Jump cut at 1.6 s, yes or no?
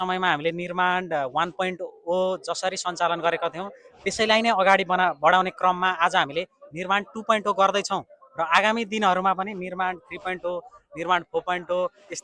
no